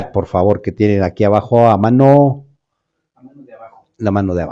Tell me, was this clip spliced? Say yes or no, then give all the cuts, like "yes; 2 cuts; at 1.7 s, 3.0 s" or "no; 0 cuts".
yes; 1 cut; at 1.4 s